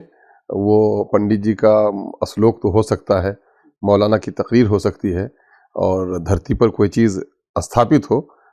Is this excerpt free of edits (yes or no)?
yes